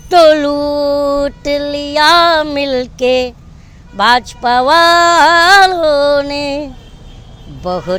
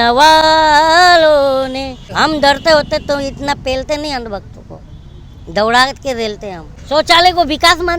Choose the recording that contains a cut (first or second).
second